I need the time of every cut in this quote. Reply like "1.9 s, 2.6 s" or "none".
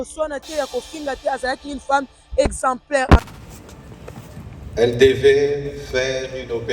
3.2 s

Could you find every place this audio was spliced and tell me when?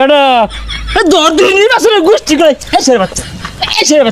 none

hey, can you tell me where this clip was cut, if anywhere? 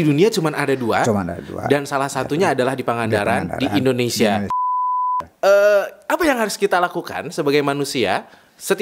4.8 s

